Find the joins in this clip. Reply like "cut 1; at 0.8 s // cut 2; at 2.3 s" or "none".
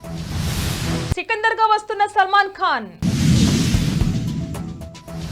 cut 1; at 1.1 s